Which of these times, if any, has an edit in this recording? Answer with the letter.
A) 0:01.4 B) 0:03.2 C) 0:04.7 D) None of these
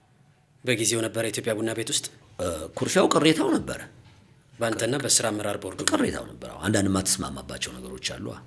D